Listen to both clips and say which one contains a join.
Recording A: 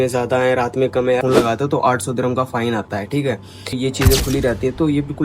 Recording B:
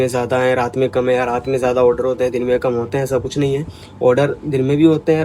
A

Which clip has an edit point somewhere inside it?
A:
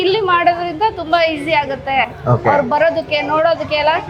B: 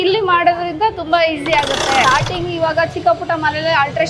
B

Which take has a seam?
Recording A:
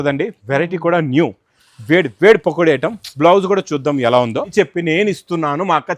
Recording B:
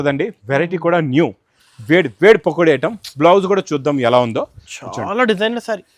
A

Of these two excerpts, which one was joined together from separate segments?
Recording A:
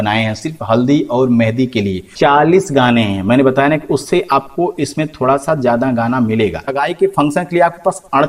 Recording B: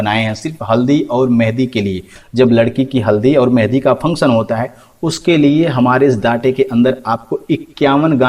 A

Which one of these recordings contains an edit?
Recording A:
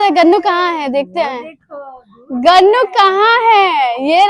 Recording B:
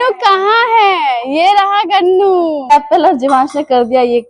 B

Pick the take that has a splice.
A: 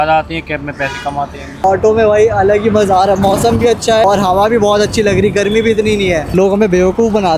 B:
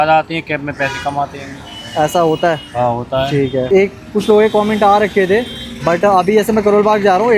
A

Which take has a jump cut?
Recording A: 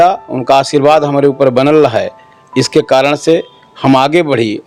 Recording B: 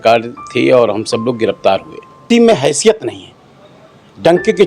B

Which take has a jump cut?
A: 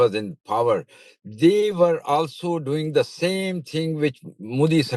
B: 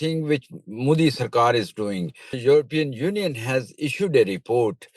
B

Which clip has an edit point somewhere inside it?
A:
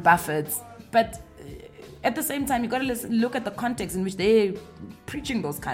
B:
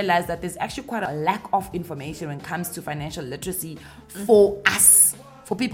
B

